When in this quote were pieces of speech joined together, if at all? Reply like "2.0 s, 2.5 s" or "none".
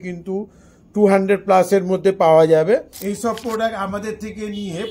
2.9 s